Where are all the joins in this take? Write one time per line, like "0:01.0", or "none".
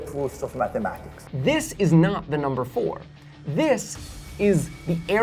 0:01.1